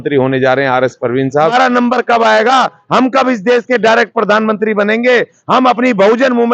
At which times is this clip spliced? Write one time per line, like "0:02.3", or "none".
0:01.4